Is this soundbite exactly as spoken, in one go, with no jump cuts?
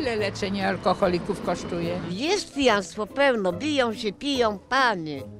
no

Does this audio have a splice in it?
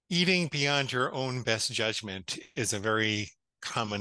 no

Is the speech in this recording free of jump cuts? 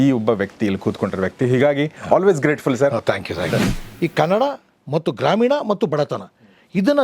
no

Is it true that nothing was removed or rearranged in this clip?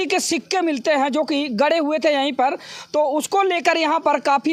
yes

